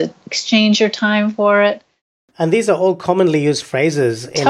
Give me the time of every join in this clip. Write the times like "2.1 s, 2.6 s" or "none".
2.3 s